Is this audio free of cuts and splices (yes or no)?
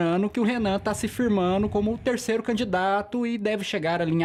yes